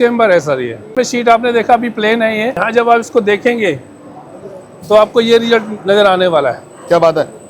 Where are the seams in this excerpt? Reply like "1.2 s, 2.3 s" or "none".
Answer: 0.9 s, 2.6 s